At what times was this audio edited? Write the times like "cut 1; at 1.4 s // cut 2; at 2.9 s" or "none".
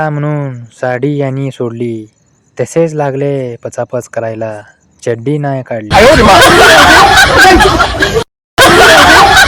cut 1; at 5.9 s